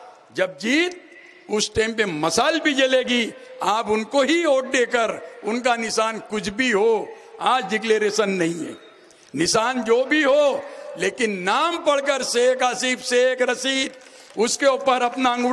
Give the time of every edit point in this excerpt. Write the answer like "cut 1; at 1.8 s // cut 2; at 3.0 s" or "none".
none